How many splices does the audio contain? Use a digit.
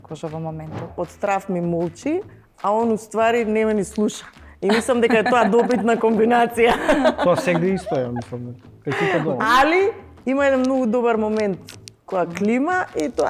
1